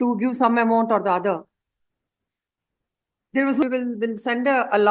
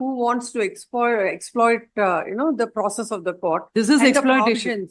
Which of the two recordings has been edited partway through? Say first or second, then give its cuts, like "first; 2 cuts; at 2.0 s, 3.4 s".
first; 1 cut; at 3.6 s